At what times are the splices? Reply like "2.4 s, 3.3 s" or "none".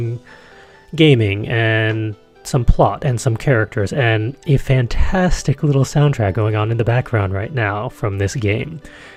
none